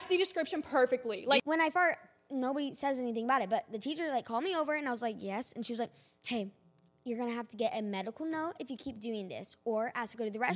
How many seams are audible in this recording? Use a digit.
1